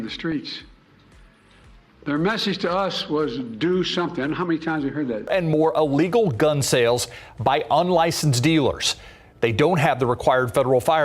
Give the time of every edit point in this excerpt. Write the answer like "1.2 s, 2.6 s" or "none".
5.2 s